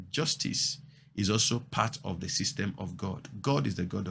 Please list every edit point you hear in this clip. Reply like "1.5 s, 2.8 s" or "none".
none